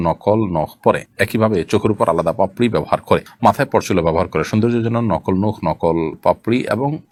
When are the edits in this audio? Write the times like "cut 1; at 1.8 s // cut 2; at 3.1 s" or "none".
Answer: none